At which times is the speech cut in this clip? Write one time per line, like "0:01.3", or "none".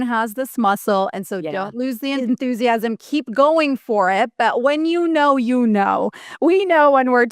0:02.2

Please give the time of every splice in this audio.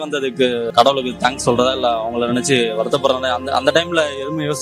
none

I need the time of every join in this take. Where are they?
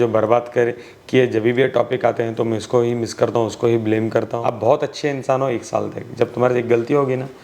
0:04.3

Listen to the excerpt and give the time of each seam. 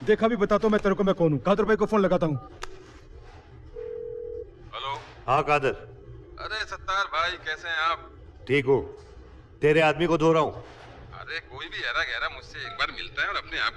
none

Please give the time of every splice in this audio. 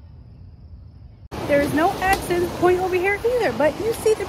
0:01.2

